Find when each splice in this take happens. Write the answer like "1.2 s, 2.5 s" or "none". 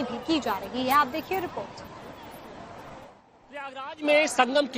2.2 s